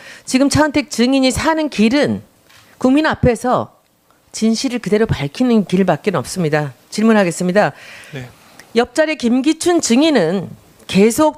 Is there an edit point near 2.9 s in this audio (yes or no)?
no